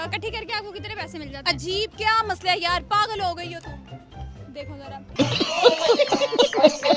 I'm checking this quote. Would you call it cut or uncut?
uncut